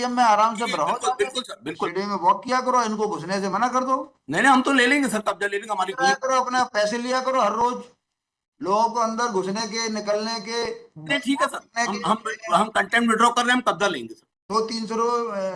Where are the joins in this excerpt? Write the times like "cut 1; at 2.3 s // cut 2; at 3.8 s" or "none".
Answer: cut 1; at 1.9 s // cut 2; at 5.9 s